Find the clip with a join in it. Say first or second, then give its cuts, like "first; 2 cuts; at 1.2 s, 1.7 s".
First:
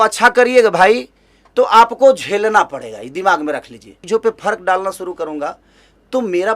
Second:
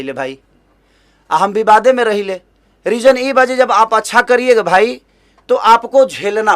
first; 1 cut; at 3.9 s